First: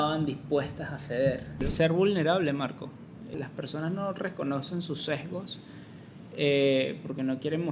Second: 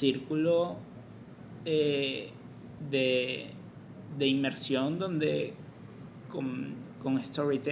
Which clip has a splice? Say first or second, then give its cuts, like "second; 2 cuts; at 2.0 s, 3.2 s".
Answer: first; 2 cuts; at 1.7 s, 3.3 s